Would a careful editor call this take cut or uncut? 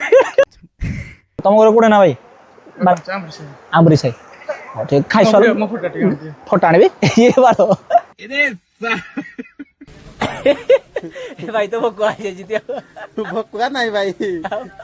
cut